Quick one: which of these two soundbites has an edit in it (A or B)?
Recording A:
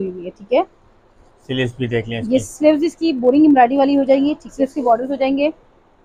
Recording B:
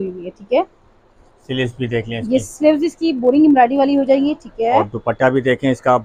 A